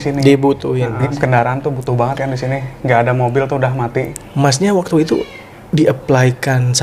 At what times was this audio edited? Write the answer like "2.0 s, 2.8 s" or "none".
1.1 s, 4.2 s